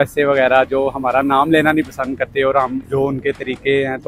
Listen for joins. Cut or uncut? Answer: cut